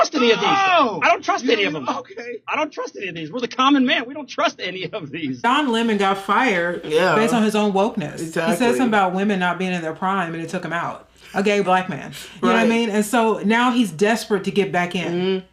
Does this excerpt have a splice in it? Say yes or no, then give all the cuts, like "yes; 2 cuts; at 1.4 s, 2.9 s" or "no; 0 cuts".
yes; 1 cut; at 5.4 s